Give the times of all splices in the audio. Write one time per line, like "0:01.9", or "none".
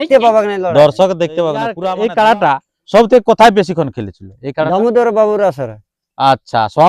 0:01.8